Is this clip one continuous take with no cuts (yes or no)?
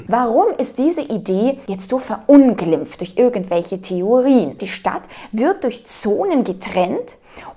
no